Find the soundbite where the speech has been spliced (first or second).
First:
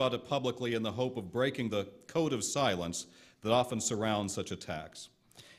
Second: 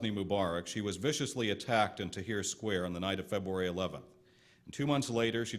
second